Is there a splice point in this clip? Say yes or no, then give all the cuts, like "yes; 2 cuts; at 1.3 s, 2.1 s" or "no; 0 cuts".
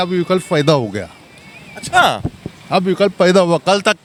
no; 0 cuts